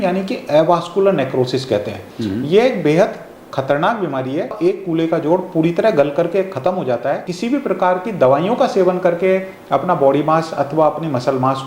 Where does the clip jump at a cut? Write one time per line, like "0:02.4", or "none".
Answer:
0:04.6
0:07.3